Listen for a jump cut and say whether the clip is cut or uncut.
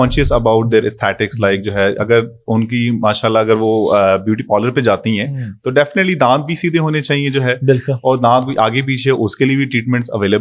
uncut